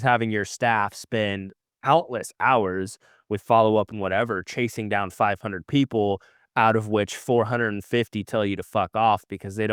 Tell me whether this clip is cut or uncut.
uncut